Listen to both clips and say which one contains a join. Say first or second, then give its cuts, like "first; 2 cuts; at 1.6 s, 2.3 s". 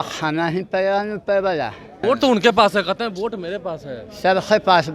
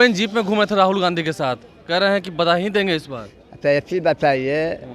first; 1 cut; at 2.0 s